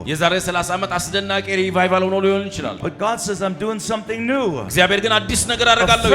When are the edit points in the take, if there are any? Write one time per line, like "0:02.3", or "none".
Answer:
0:02.8